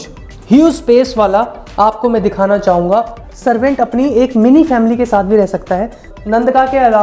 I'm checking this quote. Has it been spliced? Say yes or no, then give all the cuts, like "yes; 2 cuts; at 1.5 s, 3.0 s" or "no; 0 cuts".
yes; 2 cuts; at 3.2 s, 6.1 s